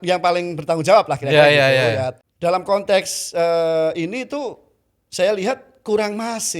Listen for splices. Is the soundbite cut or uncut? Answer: cut